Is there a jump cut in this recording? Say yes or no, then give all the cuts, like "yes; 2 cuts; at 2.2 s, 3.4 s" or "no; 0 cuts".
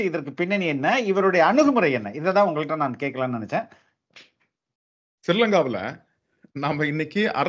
no; 0 cuts